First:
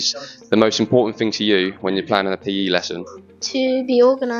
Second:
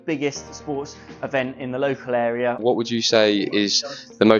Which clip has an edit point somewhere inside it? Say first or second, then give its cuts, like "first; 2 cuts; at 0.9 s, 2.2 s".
second; 1 cut; at 2.6 s